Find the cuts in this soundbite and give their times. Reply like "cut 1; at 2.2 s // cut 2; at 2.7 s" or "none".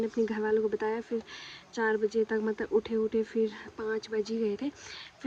none